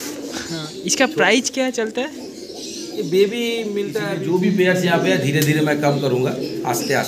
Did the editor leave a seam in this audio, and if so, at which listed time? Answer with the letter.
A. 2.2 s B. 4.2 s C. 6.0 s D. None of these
B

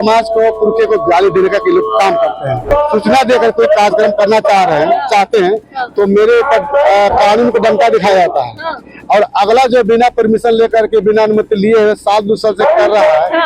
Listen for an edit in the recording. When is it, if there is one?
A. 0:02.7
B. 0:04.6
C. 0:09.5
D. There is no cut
A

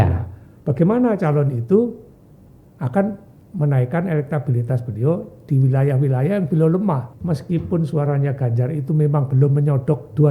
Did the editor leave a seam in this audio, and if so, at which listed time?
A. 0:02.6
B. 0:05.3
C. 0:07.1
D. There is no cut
C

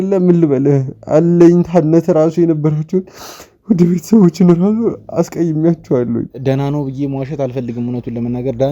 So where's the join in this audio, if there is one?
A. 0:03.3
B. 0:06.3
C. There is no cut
B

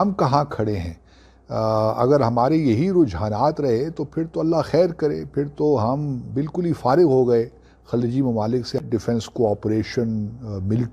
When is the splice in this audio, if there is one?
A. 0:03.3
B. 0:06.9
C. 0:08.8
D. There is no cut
C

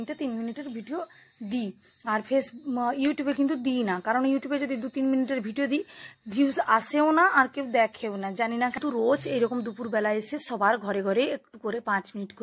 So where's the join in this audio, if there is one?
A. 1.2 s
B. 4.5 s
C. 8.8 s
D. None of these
C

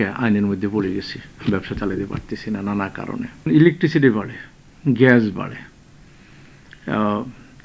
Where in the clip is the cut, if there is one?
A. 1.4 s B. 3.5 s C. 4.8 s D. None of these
B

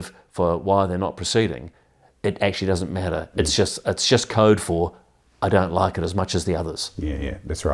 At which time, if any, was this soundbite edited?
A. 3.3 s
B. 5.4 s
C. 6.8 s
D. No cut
D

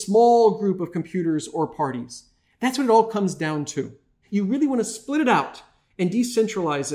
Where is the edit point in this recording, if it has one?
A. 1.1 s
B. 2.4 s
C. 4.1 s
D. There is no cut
C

